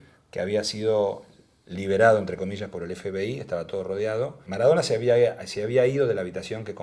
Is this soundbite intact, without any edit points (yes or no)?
no